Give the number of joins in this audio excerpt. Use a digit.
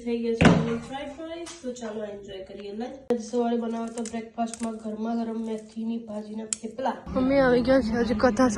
2